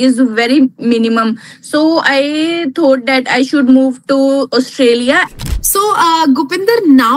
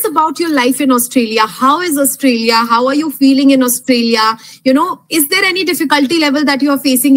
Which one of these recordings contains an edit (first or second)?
first